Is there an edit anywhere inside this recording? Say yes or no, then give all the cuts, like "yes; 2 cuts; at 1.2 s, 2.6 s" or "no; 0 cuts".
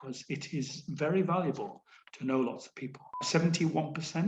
yes; 1 cut; at 3.2 s